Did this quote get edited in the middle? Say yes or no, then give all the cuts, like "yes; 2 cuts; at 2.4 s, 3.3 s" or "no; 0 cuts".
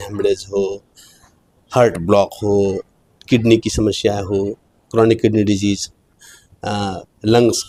no; 0 cuts